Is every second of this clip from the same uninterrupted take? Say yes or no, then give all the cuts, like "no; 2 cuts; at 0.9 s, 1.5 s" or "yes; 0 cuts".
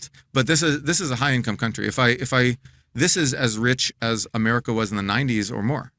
yes; 0 cuts